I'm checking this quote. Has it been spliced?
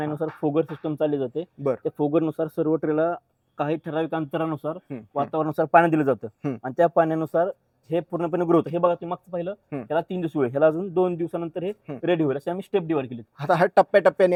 no; 0 cuts

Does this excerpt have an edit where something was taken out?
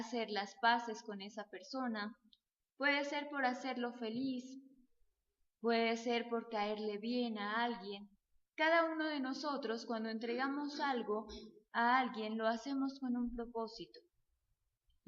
yes; 1 cut; at 13.1 s

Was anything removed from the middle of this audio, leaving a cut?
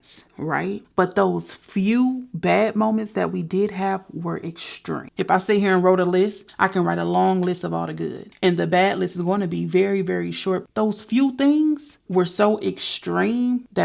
yes; 2 cuts; at 5.0 s, 10.7 s

